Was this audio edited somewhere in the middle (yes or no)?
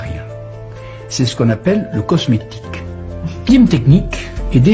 yes